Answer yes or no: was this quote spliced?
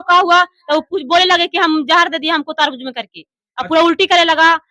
no